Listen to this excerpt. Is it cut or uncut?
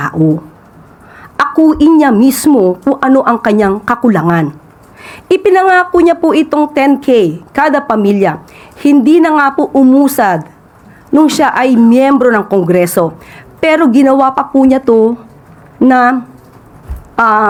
uncut